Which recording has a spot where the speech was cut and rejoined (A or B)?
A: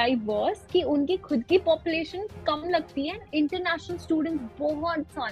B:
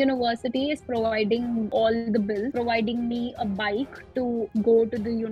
B